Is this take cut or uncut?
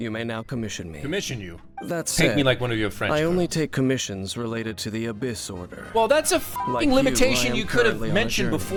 uncut